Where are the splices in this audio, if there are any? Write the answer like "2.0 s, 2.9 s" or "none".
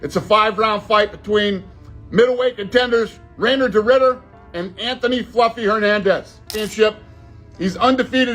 6.4 s